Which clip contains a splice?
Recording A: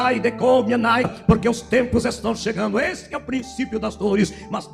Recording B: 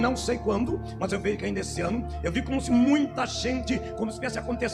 A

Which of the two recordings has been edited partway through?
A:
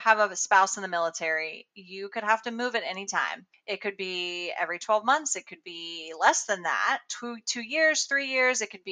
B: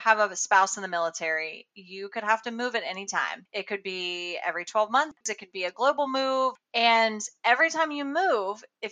B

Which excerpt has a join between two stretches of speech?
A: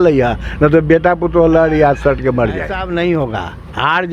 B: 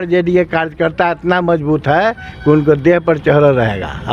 A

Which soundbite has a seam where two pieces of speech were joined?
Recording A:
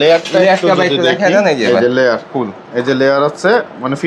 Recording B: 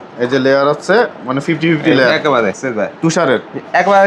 B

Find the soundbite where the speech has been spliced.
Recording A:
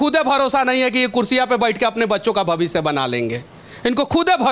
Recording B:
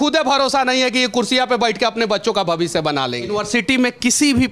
B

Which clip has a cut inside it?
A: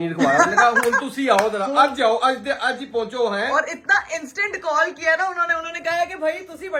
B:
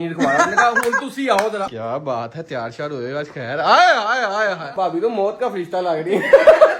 B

